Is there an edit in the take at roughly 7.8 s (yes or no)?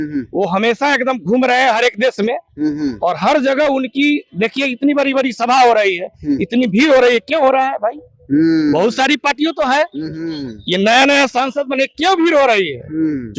no